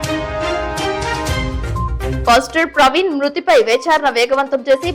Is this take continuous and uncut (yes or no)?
no